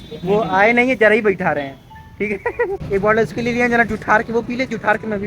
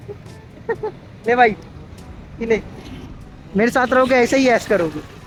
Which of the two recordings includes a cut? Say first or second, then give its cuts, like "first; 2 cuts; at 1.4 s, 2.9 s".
first; 1 cut; at 2.8 s